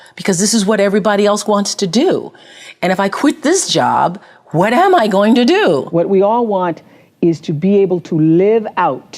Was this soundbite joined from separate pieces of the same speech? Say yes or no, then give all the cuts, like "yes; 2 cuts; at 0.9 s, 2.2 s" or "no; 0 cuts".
yes; 1 cut; at 5.9 s